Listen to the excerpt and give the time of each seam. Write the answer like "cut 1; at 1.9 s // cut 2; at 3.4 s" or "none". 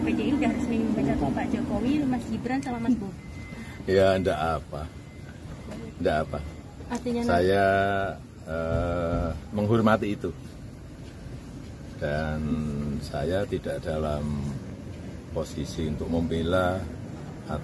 none